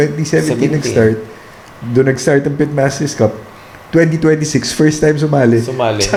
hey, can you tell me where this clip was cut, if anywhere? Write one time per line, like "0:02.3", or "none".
none